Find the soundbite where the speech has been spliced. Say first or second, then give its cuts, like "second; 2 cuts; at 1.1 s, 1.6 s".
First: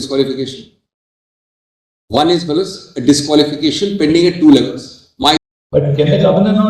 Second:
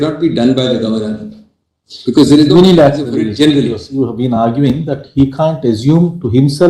first; 1 cut; at 5.5 s